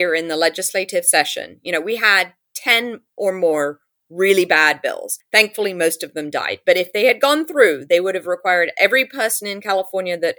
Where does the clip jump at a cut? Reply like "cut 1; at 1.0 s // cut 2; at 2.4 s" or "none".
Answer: cut 1; at 5.1 s